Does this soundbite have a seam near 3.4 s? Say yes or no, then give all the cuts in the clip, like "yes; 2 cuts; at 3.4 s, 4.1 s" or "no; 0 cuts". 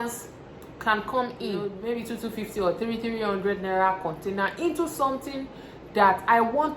no; 1 cut; at 1.8 s